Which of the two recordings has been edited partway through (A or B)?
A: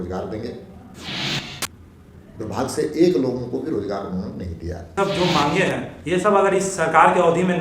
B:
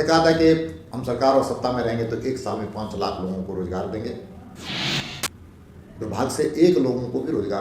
A